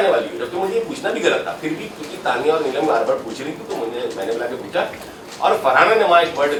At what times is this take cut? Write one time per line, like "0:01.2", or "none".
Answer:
none